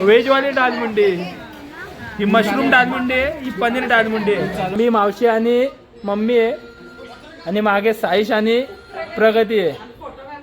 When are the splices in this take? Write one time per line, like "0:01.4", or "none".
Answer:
0:04.8